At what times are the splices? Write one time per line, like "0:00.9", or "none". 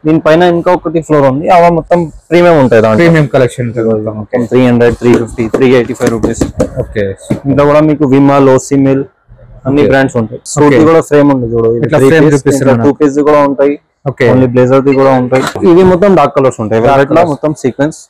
0:10.4
0:15.6